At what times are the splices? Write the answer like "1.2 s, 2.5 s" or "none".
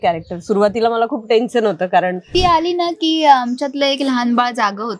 2.3 s